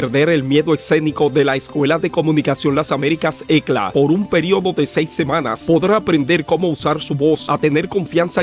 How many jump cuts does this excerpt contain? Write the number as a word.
one